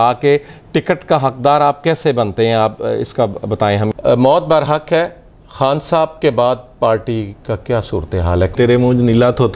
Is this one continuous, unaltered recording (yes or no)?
no